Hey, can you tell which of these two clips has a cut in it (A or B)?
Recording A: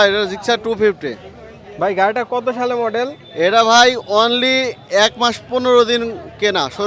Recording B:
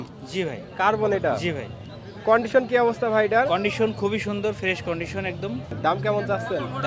B